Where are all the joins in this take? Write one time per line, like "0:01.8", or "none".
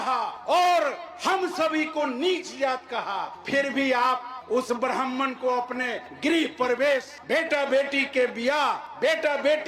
none